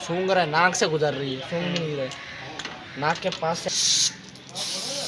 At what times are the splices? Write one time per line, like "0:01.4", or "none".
0:03.7